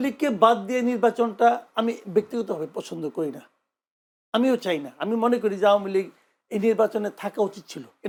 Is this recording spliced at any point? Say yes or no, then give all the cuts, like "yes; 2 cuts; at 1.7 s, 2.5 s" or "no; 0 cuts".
no; 0 cuts